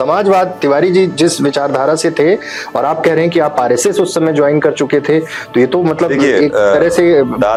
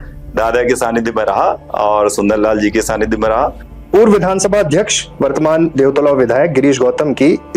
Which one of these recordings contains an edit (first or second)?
second